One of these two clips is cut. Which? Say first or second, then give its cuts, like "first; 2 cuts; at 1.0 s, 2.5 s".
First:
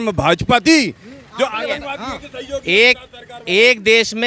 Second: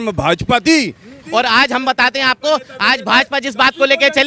second; 1 cut; at 1.2 s